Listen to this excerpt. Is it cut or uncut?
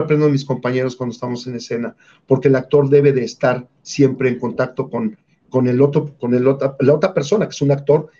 uncut